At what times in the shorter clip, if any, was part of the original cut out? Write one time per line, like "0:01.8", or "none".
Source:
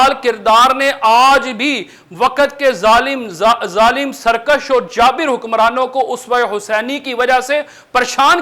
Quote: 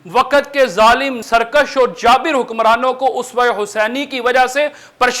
0:01.2